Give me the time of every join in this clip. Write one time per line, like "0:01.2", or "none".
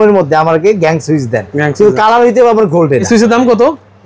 0:03.1